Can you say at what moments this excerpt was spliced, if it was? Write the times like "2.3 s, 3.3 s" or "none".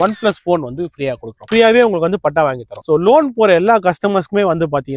1.5 s, 2.7 s